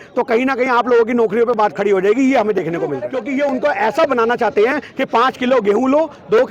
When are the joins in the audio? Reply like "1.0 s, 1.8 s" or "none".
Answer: 3.1 s